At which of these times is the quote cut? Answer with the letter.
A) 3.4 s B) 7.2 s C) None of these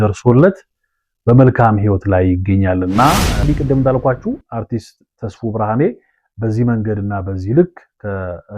A